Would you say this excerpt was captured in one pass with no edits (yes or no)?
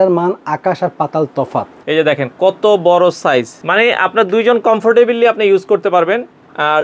no